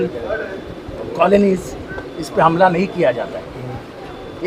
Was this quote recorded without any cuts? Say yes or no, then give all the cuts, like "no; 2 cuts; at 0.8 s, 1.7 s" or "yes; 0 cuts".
yes; 0 cuts